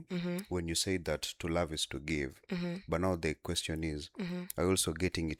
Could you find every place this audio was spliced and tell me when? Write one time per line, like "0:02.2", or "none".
none